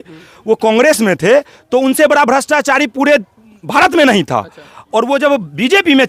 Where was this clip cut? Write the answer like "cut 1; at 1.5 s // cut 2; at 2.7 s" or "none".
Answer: none